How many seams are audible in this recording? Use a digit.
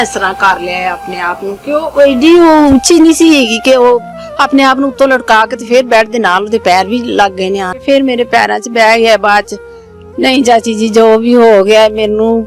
1